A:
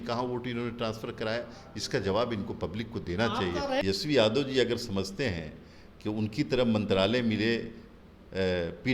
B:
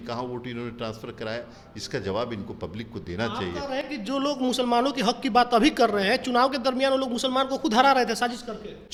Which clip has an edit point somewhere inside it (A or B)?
A